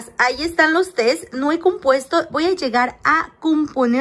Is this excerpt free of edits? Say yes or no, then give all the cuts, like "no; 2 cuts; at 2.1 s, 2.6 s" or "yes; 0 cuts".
yes; 0 cuts